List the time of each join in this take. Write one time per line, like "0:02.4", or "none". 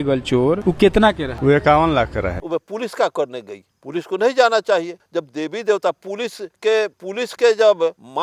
0:02.4